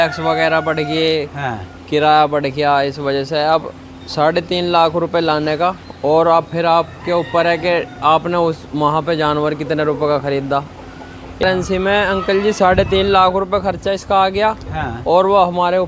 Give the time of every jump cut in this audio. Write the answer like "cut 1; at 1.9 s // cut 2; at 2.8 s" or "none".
cut 1; at 11.4 s